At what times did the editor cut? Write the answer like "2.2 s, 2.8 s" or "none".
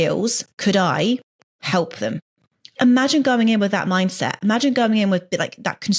2.8 s